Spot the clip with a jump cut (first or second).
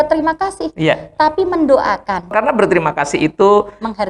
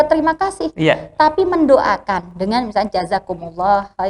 first